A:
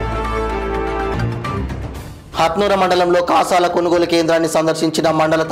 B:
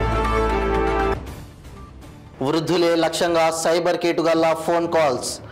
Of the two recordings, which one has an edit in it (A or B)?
A